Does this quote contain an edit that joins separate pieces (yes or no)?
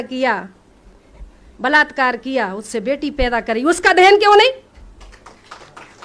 no